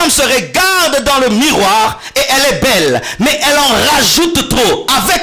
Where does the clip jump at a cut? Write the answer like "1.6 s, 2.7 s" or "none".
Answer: none